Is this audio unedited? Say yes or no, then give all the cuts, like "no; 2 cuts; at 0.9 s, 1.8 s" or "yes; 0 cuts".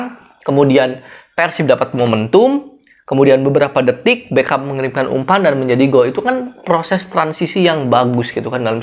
yes; 0 cuts